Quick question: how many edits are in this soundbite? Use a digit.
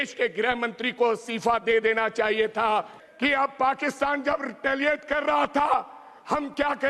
1